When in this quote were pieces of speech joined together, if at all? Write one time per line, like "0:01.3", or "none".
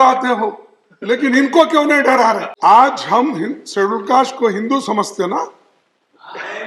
0:02.5